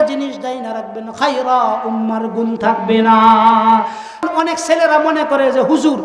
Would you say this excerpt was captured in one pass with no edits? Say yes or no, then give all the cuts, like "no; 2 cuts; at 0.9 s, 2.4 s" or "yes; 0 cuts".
no; 1 cut; at 4.2 s